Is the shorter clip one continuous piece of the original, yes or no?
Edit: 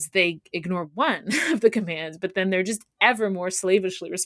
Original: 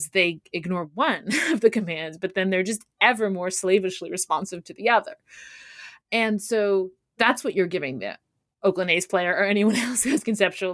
yes